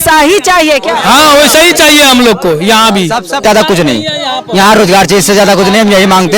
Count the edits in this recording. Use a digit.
1